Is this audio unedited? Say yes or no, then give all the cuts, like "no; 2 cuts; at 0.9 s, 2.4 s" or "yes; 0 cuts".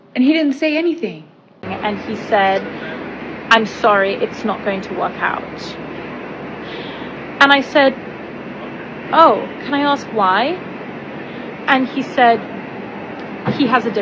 no; 1 cut; at 1.7 s